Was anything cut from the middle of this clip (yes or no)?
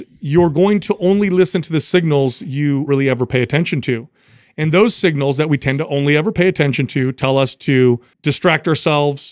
yes